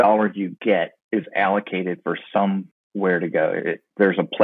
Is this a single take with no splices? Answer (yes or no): no